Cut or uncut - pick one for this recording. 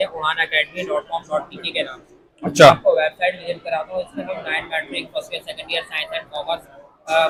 uncut